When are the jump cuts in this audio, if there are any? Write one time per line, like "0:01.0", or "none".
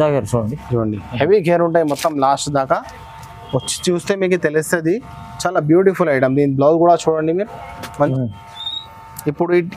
0:08.1